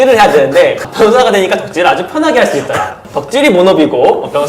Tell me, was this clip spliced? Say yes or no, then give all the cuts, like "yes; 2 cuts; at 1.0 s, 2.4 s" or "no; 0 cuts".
yes; 2 cuts; at 0.9 s, 3.0 s